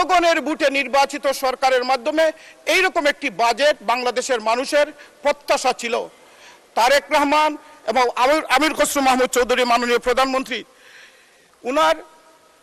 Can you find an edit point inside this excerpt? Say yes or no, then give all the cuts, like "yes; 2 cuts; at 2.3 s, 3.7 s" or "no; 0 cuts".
no; 0 cuts